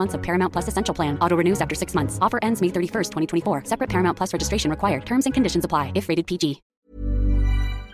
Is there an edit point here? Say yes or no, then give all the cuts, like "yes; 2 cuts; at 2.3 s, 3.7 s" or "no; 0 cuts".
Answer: yes; 1 cut; at 6.7 s